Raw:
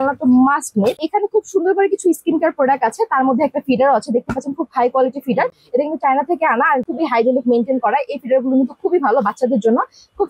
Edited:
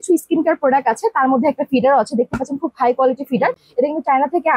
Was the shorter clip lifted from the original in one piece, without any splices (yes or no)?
yes